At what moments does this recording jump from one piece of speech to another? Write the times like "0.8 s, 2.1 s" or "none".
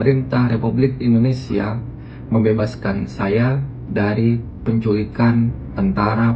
none